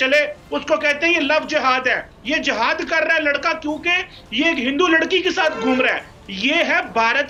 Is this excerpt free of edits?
yes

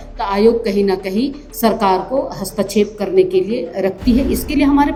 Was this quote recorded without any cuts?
yes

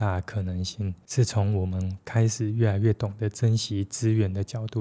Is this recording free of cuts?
yes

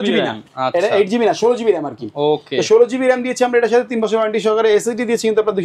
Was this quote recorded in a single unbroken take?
yes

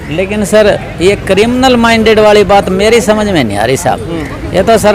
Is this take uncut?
yes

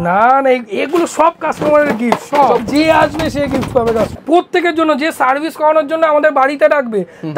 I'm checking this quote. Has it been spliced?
yes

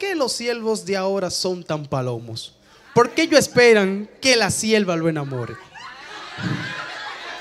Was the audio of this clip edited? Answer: no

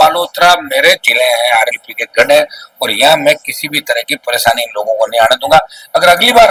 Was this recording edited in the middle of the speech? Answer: no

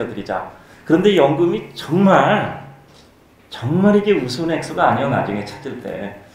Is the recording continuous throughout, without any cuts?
yes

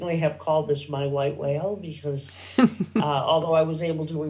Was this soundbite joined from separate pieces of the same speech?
no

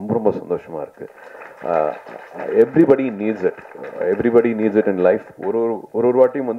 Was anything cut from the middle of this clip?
no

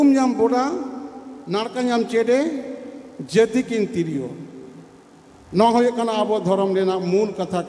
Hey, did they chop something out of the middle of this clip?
no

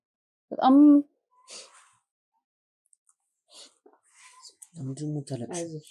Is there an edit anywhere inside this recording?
no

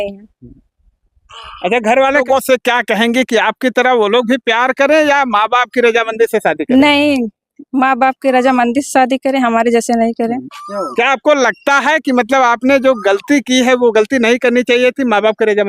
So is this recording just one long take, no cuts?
no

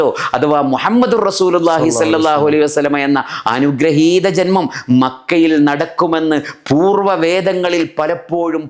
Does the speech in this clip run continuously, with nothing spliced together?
yes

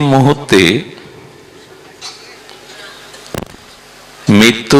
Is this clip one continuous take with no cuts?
yes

